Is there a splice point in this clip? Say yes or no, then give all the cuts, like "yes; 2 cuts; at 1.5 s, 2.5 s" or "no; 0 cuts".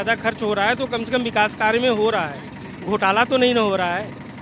no; 0 cuts